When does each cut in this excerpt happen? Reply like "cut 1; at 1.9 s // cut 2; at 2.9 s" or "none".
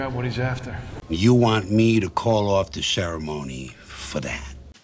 cut 1; at 1.0 s